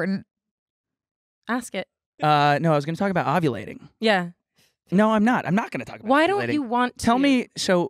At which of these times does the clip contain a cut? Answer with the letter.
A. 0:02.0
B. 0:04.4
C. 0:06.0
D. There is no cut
A